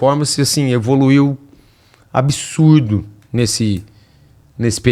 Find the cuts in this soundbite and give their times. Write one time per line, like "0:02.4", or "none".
none